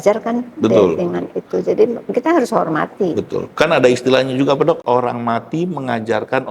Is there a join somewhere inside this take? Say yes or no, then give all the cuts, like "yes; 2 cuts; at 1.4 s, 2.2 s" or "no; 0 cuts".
yes; 1 cut; at 4.8 s